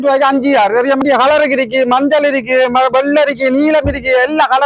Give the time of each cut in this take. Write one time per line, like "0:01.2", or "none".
0:01.0